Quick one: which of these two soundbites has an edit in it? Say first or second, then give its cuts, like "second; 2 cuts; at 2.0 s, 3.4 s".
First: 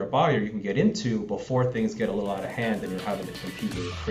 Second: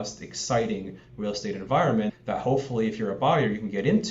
second; 1 cut; at 2.2 s